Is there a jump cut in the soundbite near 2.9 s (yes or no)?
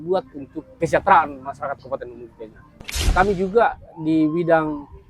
yes